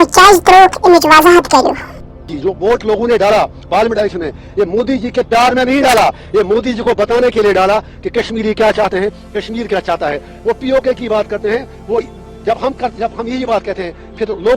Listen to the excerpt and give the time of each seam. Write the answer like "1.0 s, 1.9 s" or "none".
none